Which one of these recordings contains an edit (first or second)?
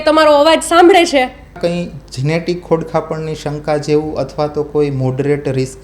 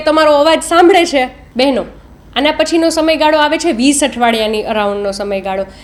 first